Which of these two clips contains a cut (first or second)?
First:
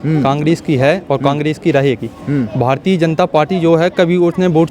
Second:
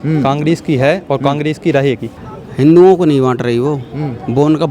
second